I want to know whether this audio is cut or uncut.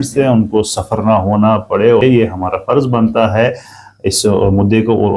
cut